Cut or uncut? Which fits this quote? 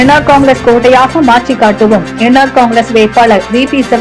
uncut